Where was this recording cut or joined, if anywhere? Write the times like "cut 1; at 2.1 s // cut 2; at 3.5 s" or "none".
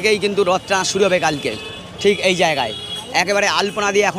none